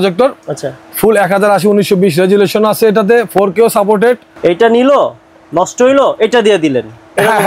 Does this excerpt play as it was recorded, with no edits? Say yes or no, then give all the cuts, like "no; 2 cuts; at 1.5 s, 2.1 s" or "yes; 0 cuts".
no; 1 cut; at 4.3 s